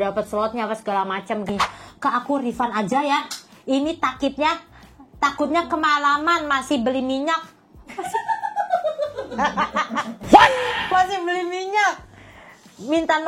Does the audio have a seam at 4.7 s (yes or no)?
no